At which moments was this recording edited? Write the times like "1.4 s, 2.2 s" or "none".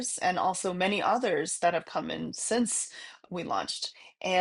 none